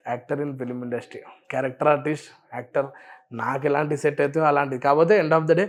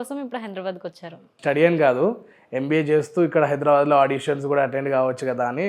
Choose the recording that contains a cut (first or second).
second